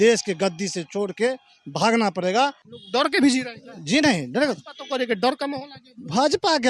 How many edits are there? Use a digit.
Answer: 1